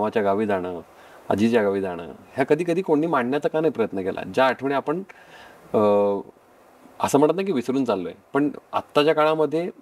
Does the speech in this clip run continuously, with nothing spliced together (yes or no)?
yes